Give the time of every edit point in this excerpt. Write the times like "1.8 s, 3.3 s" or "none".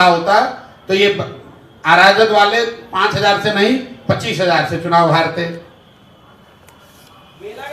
none